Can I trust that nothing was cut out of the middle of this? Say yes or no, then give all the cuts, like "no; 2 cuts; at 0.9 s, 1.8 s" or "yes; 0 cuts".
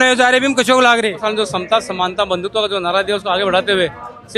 no; 1 cut; at 1.2 s